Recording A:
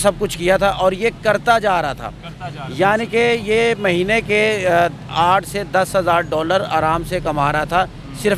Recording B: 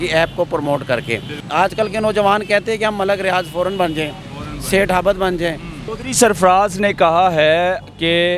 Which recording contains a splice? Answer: B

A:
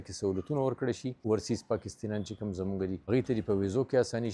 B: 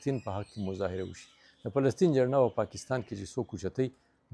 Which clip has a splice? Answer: A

